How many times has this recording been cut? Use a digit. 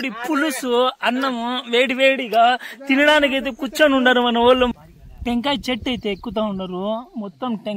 1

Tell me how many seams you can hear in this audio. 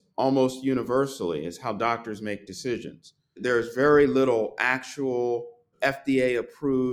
2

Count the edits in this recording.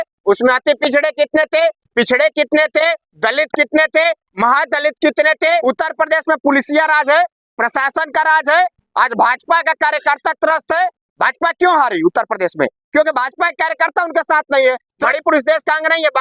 2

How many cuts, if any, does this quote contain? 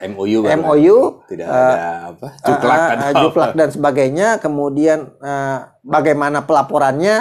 0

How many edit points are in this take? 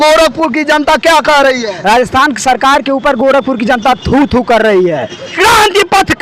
1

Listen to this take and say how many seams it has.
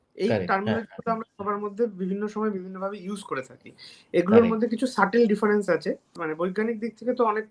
0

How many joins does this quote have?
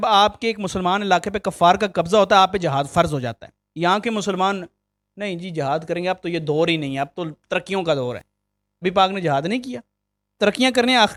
0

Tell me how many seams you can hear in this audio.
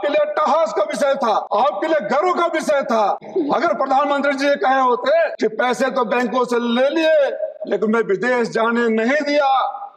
3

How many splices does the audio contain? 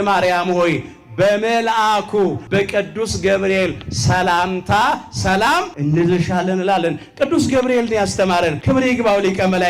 3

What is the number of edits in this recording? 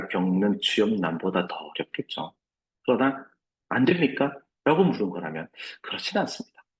0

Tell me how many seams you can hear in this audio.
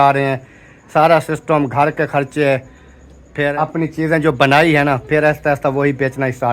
1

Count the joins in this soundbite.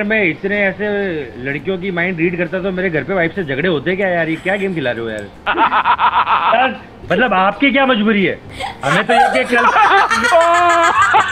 1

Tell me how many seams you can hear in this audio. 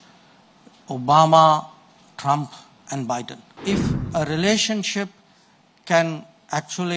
1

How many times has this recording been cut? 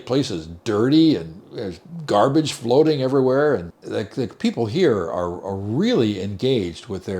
1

